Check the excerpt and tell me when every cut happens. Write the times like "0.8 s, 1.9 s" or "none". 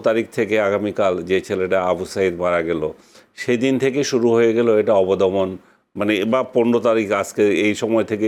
none